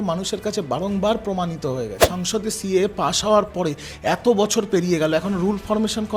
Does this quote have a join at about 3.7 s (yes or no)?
no